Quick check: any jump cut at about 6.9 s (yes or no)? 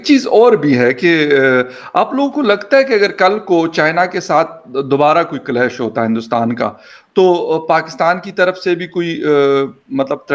no